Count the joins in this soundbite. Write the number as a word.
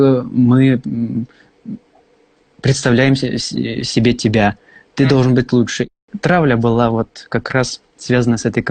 one